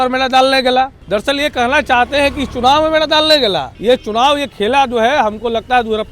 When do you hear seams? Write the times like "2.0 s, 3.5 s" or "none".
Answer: 1.0 s, 3.7 s